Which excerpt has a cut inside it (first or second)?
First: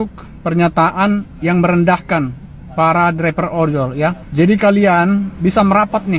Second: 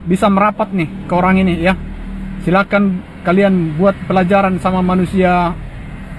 first